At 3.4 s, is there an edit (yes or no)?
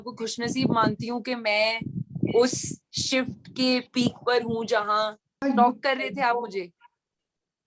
no